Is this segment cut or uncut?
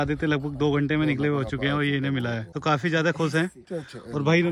cut